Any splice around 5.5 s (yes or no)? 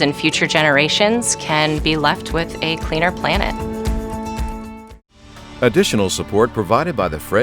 yes